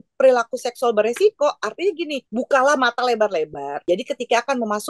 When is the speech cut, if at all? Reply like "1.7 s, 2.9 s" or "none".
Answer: 2.2 s, 3.8 s